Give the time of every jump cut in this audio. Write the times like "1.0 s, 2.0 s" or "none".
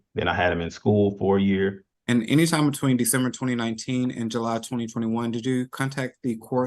1.9 s